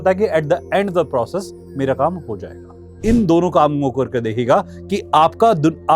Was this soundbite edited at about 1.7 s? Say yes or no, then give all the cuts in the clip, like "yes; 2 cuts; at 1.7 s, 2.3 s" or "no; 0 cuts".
no; 1 cut; at 2.9 s